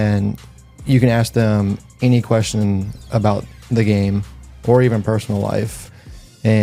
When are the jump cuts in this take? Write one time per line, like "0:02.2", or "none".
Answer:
none